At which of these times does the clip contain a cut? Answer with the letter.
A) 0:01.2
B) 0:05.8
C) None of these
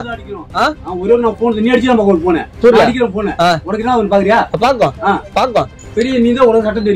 B